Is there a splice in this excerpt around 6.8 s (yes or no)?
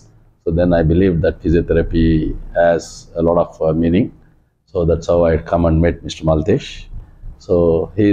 no